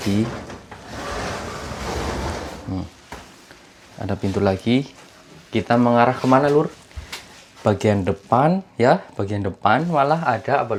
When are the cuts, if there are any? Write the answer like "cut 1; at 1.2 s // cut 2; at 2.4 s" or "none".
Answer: none